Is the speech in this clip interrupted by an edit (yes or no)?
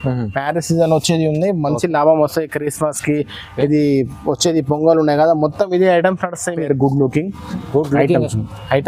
yes